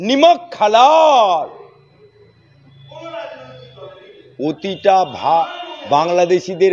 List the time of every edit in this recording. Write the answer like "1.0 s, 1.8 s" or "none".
none